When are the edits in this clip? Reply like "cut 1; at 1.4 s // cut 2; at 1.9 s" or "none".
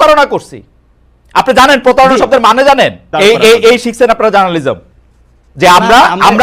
cut 1; at 3.1 s